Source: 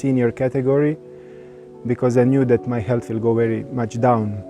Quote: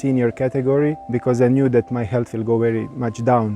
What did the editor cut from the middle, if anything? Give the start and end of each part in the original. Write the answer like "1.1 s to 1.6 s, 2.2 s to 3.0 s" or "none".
1.0 s to 1.8 s